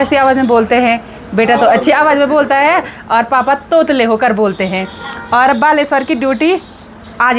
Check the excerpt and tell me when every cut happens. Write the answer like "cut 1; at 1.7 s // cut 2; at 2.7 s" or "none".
none